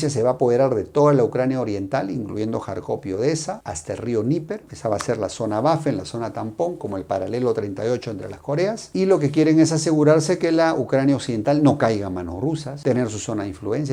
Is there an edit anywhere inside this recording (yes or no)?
no